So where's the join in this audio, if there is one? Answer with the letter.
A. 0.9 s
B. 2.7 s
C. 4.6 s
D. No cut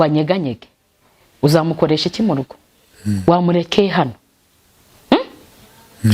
D